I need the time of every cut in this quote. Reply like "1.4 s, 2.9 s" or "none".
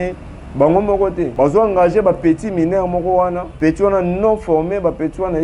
1.3 s, 3.5 s